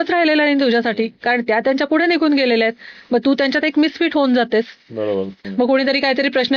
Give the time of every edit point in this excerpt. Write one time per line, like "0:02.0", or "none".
0:05.3